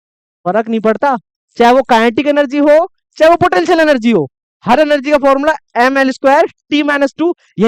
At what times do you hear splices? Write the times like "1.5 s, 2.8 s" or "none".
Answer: none